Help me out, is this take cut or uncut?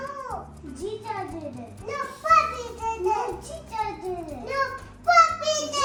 uncut